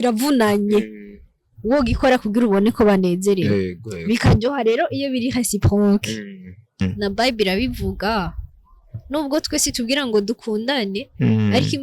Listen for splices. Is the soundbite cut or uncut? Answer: cut